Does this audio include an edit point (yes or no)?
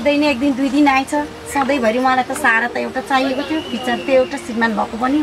no